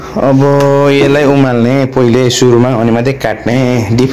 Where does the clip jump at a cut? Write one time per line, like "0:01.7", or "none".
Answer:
none